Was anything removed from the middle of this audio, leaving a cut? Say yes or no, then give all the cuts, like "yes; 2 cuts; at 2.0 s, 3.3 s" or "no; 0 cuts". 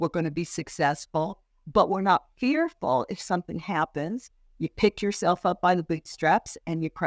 no; 0 cuts